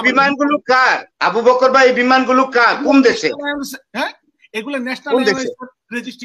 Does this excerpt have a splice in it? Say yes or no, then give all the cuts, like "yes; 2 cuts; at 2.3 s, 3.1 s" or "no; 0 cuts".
no; 0 cuts